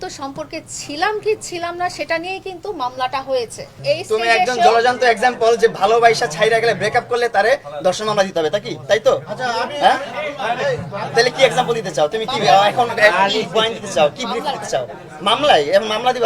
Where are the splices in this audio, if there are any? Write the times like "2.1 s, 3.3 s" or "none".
3.7 s